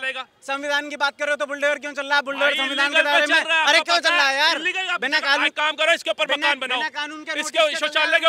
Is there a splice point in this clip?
no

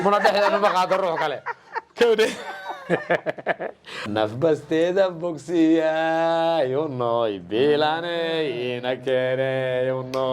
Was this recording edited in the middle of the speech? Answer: yes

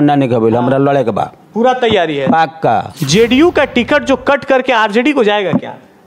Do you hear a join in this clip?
yes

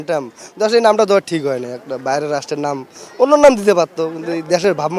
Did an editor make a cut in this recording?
no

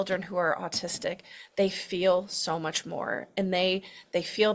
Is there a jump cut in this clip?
no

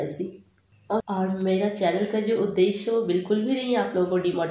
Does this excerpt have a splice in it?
yes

